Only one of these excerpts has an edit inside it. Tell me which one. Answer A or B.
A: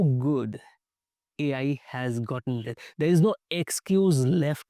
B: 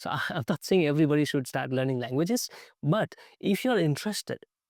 A